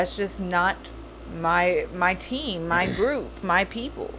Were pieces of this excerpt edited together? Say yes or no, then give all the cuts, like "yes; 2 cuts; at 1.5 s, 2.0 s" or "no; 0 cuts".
no; 0 cuts